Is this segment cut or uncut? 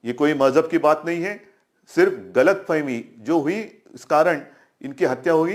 uncut